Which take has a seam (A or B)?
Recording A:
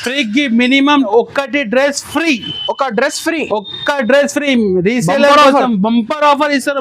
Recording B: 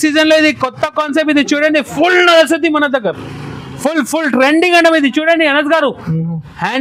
A